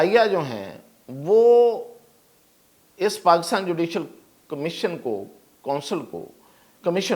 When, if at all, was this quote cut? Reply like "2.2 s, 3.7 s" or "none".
none